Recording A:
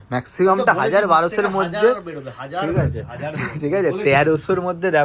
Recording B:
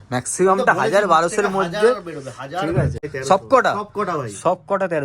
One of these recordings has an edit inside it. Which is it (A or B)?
B